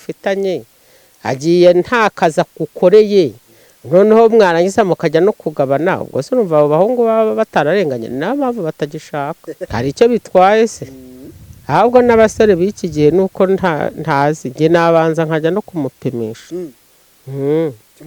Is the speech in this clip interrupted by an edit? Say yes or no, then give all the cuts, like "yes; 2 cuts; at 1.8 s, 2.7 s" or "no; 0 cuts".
yes; 1 cut; at 9.5 s